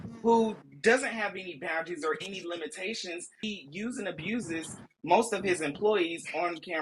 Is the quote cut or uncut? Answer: cut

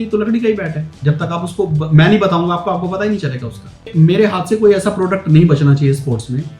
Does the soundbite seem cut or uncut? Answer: cut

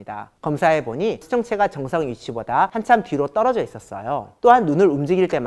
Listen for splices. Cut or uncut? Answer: cut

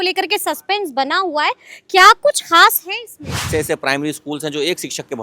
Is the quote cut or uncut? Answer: cut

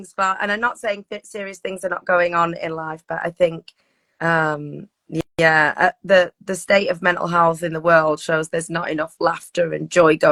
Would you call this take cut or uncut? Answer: uncut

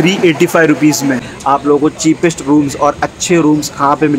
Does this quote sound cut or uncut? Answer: cut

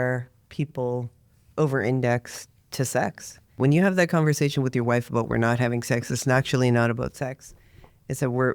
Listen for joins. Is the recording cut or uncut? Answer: cut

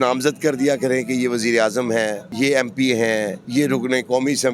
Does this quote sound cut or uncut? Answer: cut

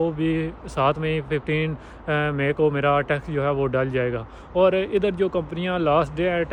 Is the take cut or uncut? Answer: uncut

